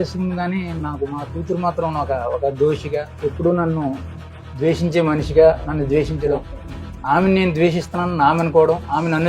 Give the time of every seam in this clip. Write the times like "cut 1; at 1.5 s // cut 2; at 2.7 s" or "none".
cut 1; at 3.1 s